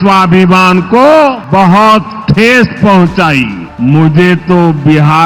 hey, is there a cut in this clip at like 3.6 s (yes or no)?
yes